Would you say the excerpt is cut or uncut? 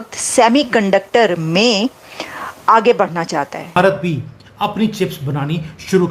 cut